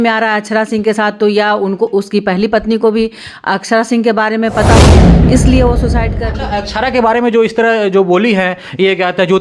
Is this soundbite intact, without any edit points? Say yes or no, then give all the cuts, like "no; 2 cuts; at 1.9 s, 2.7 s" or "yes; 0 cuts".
no; 1 cut; at 6.2 s